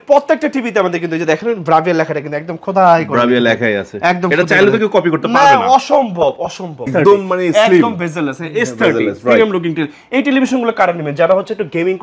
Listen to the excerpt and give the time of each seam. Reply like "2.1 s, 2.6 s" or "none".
6.9 s